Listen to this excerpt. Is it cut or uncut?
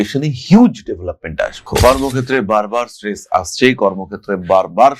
cut